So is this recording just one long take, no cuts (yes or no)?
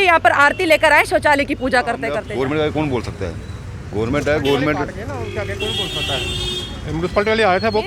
no